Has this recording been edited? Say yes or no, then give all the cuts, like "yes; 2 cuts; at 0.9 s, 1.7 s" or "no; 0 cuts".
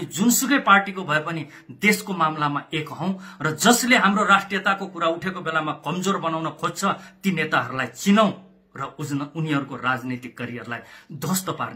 no; 0 cuts